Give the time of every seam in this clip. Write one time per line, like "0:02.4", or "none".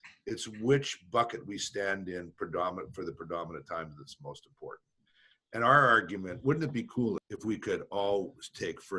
0:07.2